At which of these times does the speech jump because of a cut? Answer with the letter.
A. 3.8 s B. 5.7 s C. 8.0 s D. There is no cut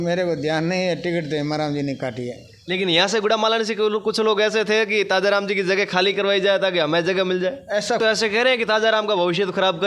C